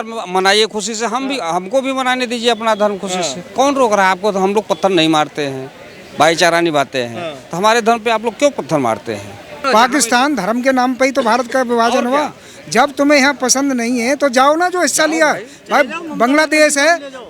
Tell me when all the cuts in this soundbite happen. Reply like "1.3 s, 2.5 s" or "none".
9.6 s

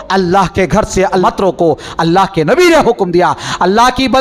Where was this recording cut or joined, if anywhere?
1.2 s

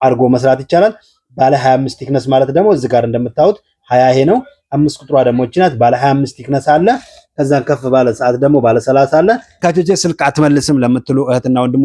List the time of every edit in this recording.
9.6 s

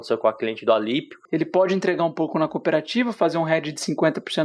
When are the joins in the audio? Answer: 1.2 s

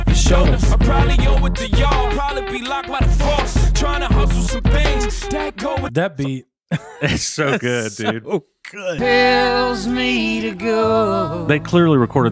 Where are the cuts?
9.0 s

